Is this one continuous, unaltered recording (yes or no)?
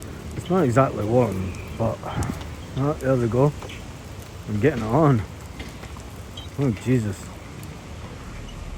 yes